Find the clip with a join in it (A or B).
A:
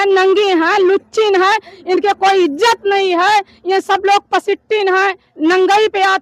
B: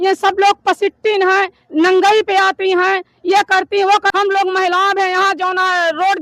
B